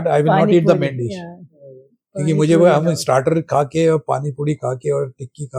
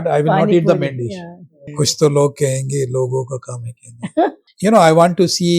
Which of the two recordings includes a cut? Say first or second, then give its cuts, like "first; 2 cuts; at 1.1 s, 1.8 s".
second; 2 cuts; at 1.6 s, 4.5 s